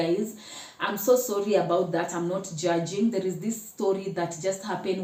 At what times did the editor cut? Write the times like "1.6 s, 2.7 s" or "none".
none